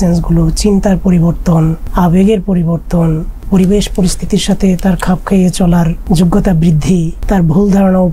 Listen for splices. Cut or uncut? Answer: cut